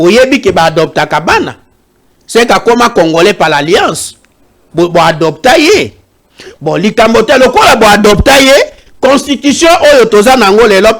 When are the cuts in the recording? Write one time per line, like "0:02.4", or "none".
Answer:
none